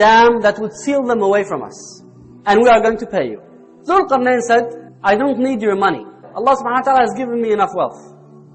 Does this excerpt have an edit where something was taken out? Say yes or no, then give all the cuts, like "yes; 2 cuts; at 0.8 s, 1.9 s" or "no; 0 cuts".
no; 0 cuts